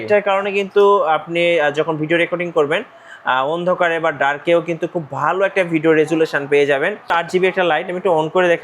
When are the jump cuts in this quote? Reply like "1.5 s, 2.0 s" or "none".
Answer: 7.1 s